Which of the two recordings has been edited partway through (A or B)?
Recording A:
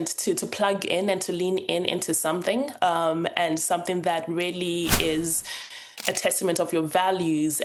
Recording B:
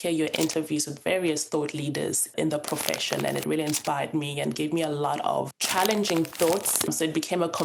B